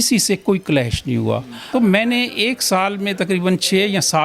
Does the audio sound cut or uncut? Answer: cut